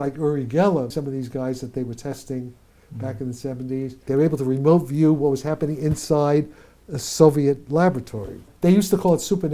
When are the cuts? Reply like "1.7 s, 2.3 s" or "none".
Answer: 0.9 s, 4.0 s, 8.5 s